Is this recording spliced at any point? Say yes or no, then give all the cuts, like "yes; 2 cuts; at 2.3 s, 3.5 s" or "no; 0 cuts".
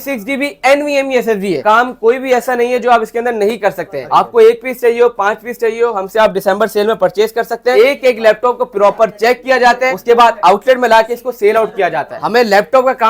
yes; 5 cuts; at 1.6 s, 3.9 s, 7.7 s, 9.9 s, 12.1 s